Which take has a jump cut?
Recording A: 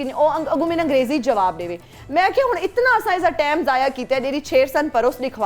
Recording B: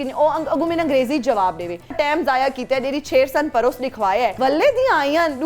B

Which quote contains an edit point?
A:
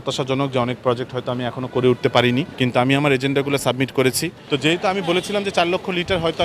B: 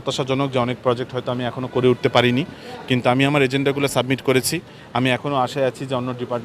A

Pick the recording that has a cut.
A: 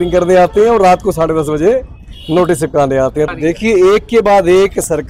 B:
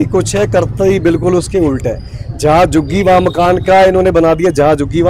A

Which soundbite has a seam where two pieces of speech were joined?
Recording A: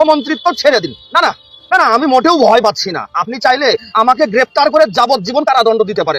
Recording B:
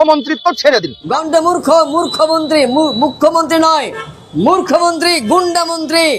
B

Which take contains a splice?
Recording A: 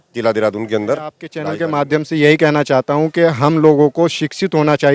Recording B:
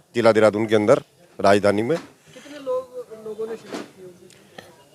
A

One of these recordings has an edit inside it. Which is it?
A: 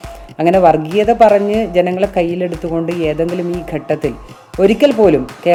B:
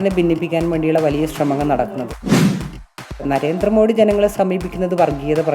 B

